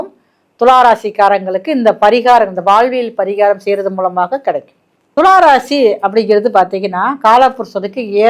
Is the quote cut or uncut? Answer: uncut